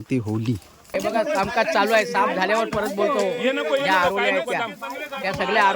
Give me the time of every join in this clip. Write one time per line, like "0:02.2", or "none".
0:00.9

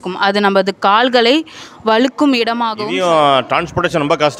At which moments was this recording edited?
0:02.7

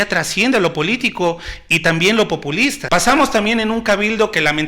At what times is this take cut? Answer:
0:02.8

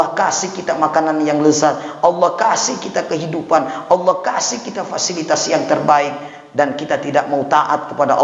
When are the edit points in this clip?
none

